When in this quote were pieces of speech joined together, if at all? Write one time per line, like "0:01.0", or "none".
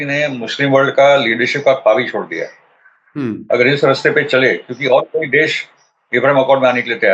none